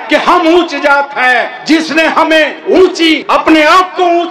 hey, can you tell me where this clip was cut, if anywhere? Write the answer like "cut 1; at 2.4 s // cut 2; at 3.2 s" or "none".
cut 1; at 3.1 s